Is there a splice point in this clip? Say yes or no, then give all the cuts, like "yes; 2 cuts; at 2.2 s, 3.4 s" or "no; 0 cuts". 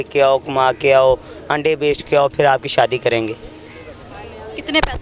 no; 0 cuts